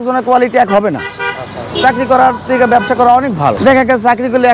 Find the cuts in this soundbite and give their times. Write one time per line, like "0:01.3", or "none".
0:01.7
0:03.6